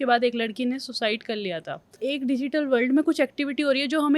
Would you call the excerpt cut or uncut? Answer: cut